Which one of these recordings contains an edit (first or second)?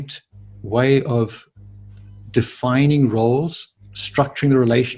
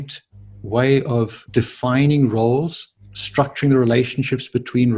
second